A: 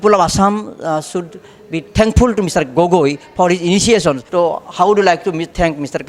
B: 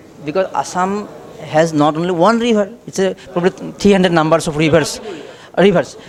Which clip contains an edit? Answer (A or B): A